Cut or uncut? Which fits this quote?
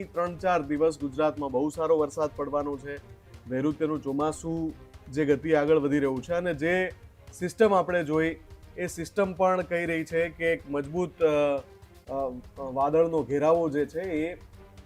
uncut